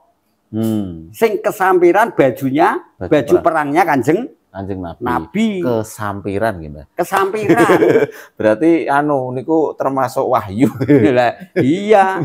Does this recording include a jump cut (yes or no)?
yes